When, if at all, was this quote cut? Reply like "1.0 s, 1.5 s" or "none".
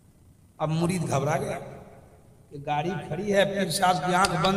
none